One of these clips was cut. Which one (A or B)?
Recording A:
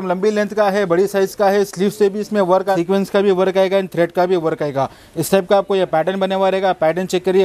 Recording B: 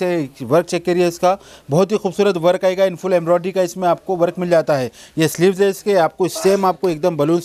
A